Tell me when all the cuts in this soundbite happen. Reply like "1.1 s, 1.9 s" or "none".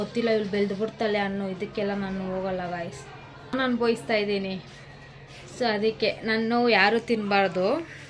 3.5 s